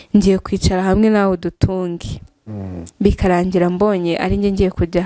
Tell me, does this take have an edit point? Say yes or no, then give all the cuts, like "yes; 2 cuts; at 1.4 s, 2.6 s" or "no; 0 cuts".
no; 0 cuts